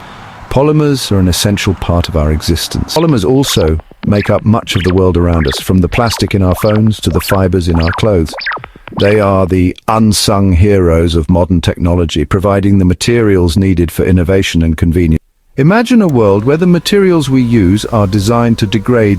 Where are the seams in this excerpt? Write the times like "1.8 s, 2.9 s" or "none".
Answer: 3.0 s, 15.3 s